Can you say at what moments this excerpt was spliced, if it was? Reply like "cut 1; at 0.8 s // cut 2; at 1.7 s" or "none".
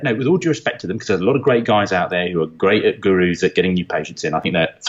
none